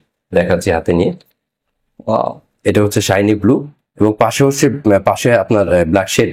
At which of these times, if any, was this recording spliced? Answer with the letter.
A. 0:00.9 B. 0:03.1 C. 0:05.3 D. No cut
D